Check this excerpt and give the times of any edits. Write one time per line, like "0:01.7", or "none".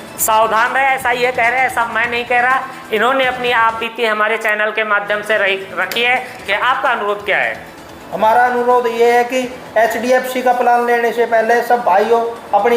0:06.4